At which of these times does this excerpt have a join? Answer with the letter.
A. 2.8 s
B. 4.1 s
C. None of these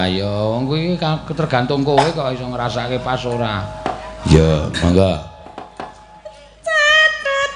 C